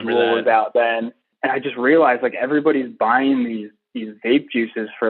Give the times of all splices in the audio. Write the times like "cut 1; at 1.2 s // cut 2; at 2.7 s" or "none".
cut 1; at 1.3 s